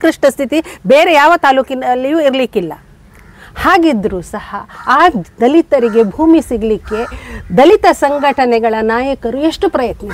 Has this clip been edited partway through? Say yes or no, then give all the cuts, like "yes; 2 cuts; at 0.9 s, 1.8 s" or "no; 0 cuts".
no; 0 cuts